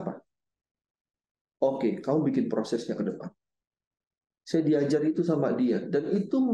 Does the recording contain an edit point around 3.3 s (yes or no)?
no